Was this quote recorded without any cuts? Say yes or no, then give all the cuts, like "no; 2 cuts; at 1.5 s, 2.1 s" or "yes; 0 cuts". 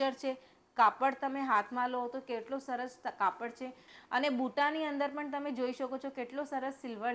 no; 1 cut; at 3.9 s